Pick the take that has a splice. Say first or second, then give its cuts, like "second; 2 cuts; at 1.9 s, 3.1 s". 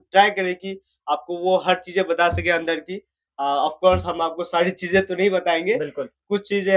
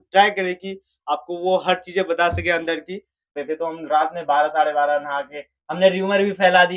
second; 1 cut; at 3.4 s